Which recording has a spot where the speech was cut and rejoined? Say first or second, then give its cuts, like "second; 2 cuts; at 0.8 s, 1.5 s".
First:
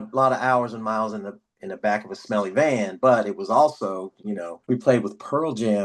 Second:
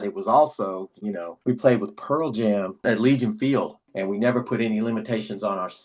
second; 1 cut; at 3.8 s